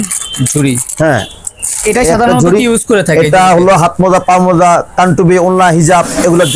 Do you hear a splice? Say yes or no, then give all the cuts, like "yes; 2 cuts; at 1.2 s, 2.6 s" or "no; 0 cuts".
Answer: no; 0 cuts